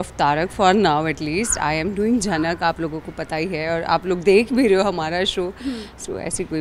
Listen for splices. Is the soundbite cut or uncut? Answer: uncut